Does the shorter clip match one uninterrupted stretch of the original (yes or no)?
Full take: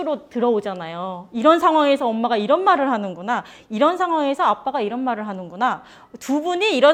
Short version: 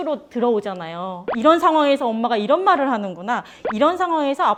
yes